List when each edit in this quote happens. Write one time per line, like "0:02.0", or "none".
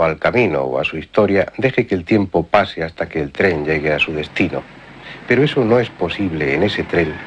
none